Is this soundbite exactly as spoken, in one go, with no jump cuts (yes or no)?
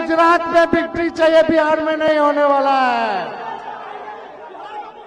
yes